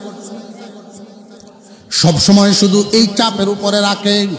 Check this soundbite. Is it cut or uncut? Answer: uncut